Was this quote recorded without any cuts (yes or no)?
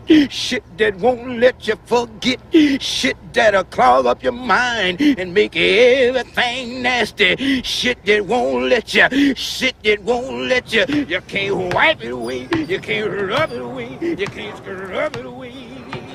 yes